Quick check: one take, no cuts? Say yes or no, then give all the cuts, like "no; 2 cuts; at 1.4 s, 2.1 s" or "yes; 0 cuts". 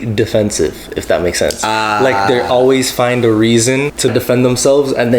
no; 1 cut; at 4.1 s